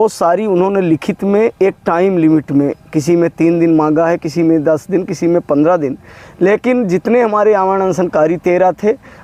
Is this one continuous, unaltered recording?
yes; 0 cuts

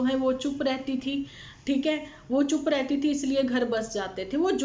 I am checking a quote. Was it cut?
no; 0 cuts

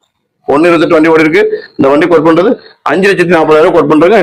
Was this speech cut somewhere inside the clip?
no; 0 cuts

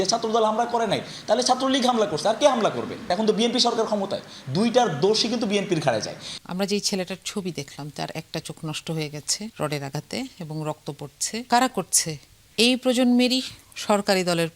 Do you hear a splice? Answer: yes; 4 cuts; at 3.0 s, 6.4 s, 9.5 s, 11.5 s

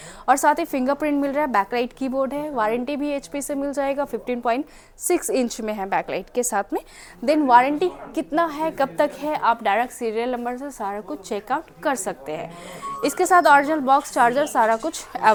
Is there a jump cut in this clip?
no; 0 cuts

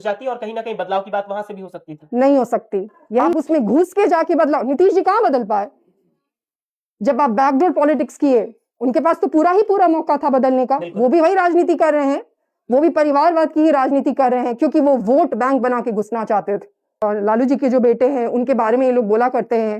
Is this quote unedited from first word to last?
no; 2 cuts; at 3.3 s, 17.0 s

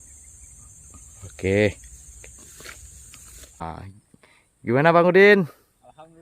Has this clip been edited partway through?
yes; 1 cut; at 3.6 s

